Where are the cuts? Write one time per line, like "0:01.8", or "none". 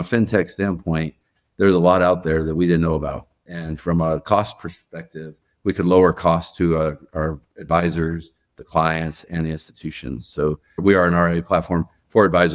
0:10.7